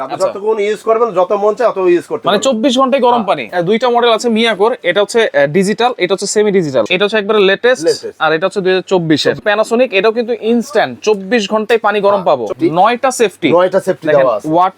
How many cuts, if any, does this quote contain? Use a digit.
4